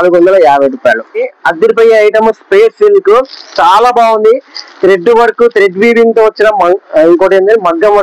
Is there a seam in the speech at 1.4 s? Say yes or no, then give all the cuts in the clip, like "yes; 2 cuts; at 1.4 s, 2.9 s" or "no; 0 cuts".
yes; 1 cut; at 1.4 s